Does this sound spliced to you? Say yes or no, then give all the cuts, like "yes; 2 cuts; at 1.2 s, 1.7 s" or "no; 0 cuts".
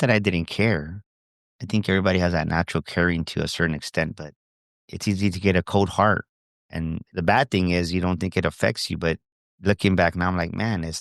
yes; 1 cut; at 4.9 s